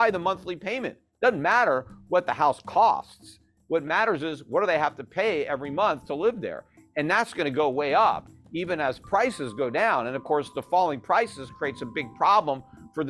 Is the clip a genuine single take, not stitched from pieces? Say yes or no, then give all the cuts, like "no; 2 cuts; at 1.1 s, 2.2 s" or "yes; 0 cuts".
yes; 0 cuts